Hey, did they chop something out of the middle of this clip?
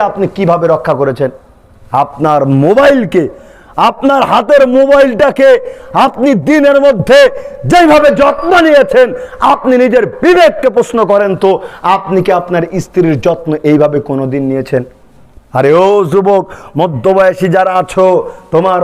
no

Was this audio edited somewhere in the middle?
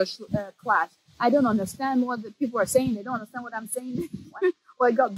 yes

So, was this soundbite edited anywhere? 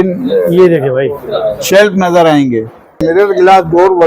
yes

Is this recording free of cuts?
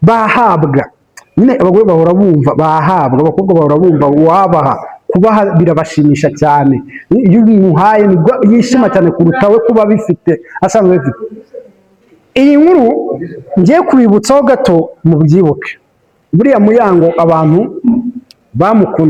yes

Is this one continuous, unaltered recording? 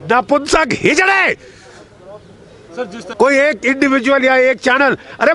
no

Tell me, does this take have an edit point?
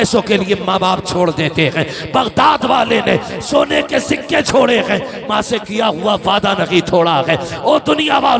no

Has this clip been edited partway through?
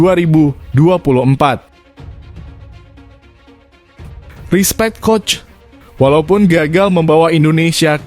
yes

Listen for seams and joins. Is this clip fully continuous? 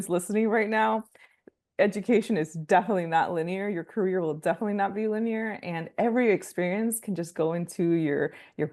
yes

